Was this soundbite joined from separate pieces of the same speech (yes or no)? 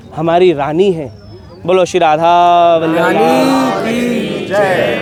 no